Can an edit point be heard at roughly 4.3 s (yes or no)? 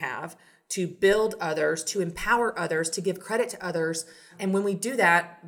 yes